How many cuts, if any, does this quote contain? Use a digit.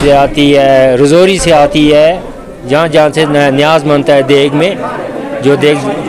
0